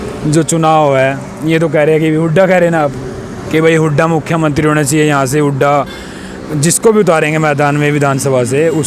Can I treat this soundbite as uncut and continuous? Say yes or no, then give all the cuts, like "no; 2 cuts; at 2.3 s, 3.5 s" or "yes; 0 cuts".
yes; 0 cuts